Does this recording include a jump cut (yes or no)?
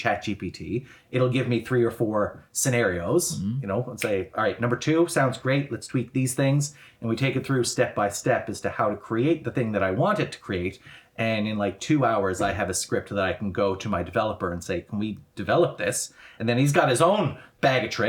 no